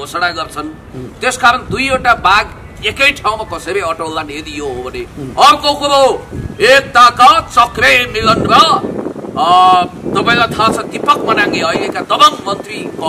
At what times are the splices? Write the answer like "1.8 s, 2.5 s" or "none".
none